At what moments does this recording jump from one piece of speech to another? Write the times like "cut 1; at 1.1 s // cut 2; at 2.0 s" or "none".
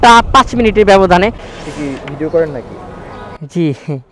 cut 1; at 1.3 s